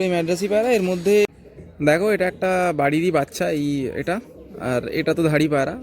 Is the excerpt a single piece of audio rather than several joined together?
no; 1 cut; at 1.3 s

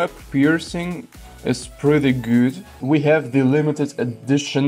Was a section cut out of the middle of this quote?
yes; 1 cut; at 2.7 s

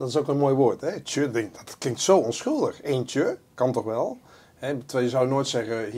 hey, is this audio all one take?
yes; 0 cuts

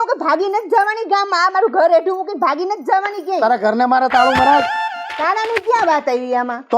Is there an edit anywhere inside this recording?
no; 0 cuts

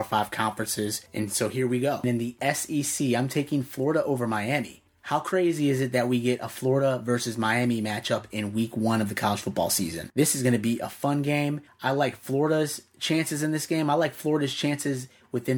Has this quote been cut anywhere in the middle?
yes; 2 cuts; at 2.0 s, 10.0 s

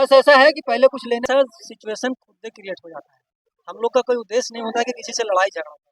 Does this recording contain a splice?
yes; 1 cut; at 1.2 s

